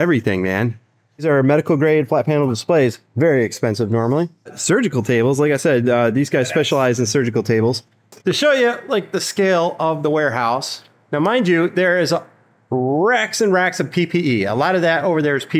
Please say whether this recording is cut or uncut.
cut